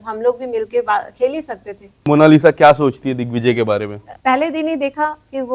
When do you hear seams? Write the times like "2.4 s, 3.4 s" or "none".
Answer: 2.0 s, 4.1 s